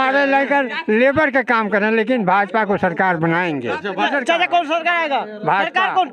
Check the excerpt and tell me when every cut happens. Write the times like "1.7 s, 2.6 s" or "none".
4.1 s